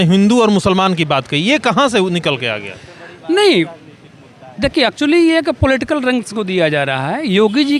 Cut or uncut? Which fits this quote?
uncut